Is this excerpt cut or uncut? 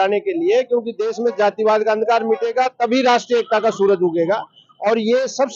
uncut